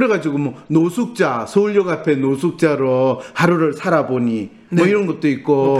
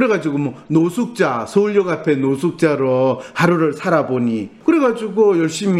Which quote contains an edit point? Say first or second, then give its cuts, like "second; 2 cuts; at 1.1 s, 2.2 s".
second; 1 cut; at 4.5 s